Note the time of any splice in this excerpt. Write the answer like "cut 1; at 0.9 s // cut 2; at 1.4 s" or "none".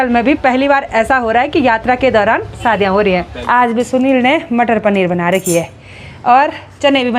cut 1; at 3.3 s